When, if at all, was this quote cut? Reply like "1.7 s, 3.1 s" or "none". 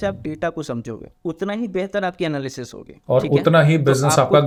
none